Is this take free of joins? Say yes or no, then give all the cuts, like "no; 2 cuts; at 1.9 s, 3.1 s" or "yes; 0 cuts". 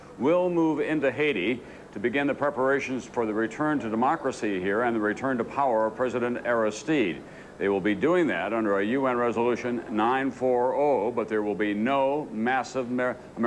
yes; 0 cuts